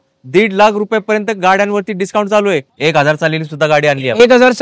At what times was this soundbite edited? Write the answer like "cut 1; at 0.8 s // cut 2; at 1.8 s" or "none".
cut 1; at 2.7 s